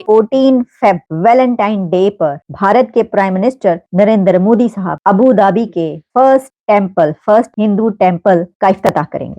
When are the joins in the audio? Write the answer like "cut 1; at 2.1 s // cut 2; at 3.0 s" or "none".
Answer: cut 1; at 1.1 s // cut 2; at 2.5 s // cut 3; at 3.8 s // cut 4; at 4.9 s // cut 5; at 6.0 s // cut 6; at 6.5 s // cut 7; at 7.5 s // cut 8; at 8.5 s